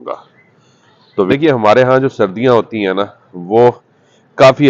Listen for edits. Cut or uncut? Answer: cut